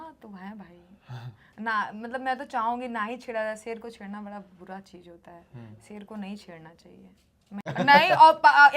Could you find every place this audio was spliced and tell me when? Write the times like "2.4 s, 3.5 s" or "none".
7.7 s